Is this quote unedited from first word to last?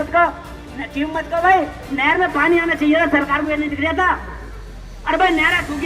yes; 0 cuts

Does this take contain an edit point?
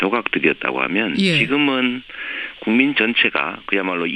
yes; 1 cut; at 3.1 s

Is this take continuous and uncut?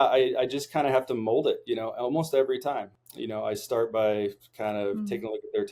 yes; 0 cuts

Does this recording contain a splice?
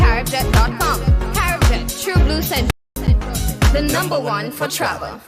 yes; 1 cut; at 2.7 s

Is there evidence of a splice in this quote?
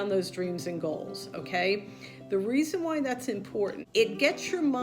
yes; 1 cut; at 3.8 s

